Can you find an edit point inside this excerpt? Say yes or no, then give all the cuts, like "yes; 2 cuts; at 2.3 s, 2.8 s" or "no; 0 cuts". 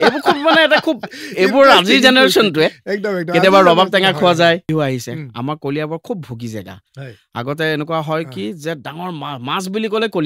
yes; 1 cut; at 4.6 s